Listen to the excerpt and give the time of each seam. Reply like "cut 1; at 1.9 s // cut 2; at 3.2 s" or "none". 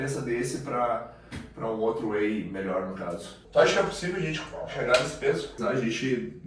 cut 1; at 3.3 s // cut 2; at 5.6 s